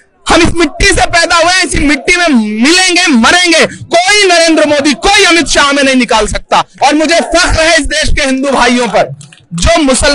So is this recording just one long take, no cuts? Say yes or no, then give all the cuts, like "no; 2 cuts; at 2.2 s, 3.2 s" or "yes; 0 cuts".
no; 1 cut; at 6.7 s